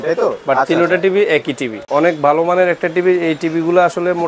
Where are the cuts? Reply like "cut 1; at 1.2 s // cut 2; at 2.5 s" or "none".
cut 1; at 1.7 s